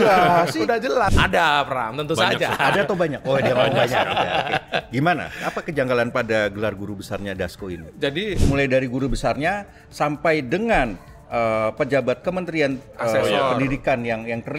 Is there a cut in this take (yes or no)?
yes